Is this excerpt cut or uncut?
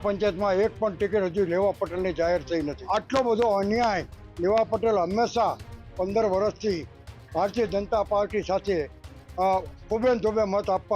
cut